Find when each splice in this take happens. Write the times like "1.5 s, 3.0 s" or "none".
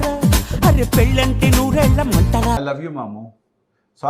2.6 s